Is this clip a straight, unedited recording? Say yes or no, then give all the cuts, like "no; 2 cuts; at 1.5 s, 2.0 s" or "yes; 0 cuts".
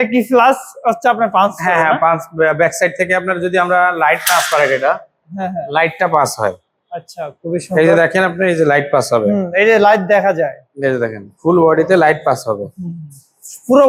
yes; 0 cuts